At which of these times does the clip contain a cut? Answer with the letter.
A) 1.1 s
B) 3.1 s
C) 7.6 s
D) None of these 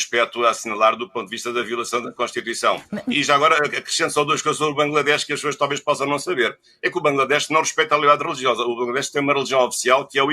B